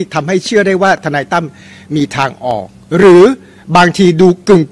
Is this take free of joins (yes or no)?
yes